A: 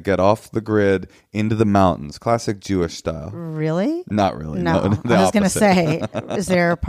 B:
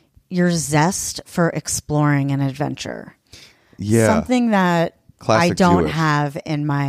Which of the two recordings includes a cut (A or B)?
B